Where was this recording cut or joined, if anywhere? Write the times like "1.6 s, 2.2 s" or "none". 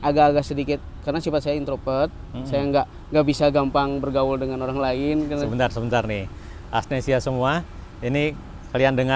none